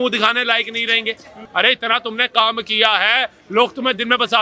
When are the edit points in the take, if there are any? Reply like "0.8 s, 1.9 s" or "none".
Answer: 1.4 s